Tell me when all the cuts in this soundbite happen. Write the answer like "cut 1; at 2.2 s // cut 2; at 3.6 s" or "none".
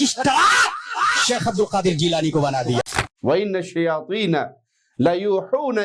cut 1; at 2.8 s